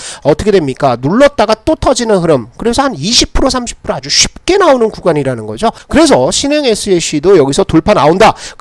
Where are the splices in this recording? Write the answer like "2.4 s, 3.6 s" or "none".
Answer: none

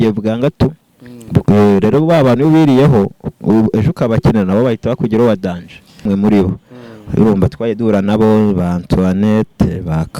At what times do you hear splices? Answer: 6.0 s

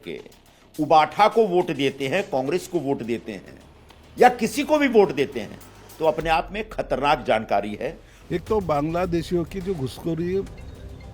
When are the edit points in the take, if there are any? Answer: 8.1 s

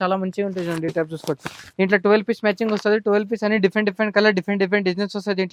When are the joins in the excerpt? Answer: none

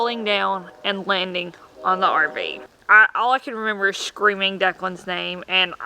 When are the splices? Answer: 2.6 s

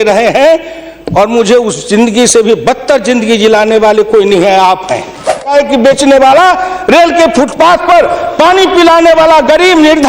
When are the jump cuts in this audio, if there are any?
5.5 s

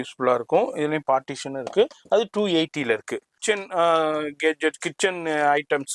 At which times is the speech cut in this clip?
3.2 s

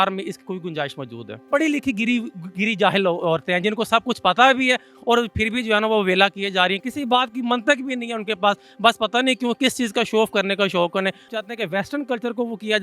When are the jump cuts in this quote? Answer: 1.4 s, 6.8 s, 11.3 s

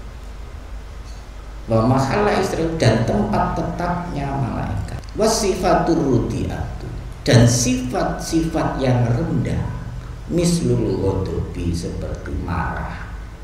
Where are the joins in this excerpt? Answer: 4.9 s

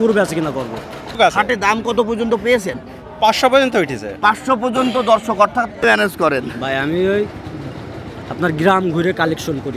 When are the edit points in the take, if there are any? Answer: 1.2 s, 5.8 s

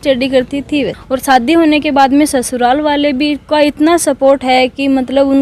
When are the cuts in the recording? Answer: 1.0 s

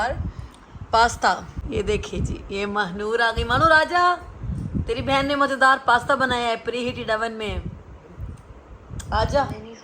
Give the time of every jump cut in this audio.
1.5 s

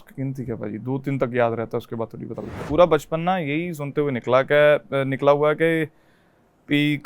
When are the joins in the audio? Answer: 2.6 s

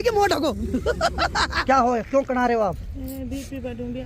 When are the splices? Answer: 1.6 s

